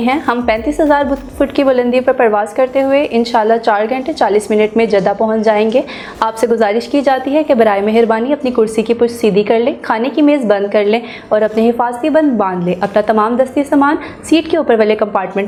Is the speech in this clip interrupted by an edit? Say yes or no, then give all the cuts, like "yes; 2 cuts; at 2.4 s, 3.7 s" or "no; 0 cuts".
no; 0 cuts